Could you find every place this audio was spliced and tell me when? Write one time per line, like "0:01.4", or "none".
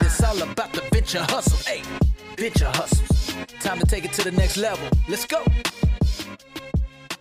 none